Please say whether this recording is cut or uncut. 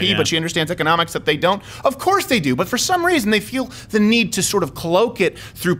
uncut